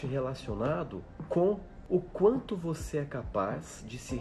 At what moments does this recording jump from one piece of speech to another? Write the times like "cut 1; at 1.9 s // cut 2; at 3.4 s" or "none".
cut 1; at 1.1 s // cut 2; at 1.7 s